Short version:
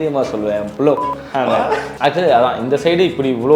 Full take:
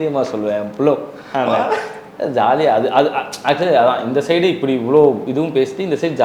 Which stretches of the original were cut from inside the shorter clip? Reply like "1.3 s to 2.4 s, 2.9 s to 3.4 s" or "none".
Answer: 1.9 s to 3.3 s